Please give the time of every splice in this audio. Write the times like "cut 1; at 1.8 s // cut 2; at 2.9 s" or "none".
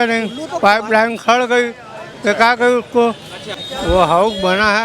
none